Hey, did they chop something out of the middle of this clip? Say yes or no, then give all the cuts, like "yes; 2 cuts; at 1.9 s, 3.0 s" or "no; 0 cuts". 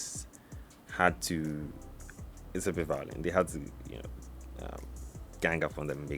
no; 0 cuts